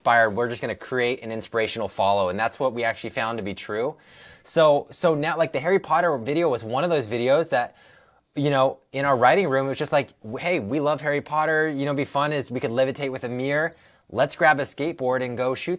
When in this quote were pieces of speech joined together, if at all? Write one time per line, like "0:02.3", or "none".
none